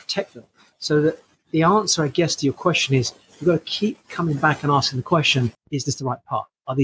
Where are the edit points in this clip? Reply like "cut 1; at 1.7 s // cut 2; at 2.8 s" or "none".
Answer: cut 1; at 5.5 s